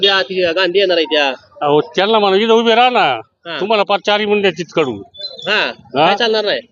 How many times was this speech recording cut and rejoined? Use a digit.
0